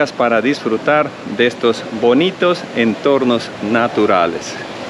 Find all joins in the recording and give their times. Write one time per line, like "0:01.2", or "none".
none